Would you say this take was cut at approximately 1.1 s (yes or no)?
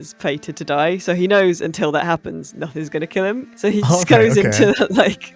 no